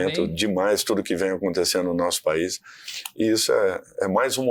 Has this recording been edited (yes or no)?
no